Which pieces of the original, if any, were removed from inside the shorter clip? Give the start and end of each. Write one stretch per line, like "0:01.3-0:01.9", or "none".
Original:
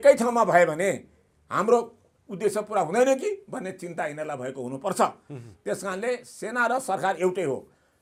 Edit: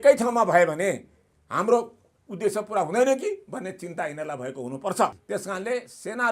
0:05.2-0:05.6